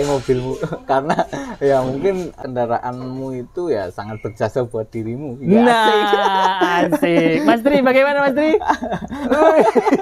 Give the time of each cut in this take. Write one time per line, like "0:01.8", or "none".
0:02.3